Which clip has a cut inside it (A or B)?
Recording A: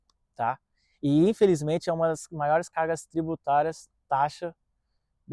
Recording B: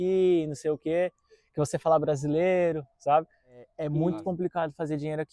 B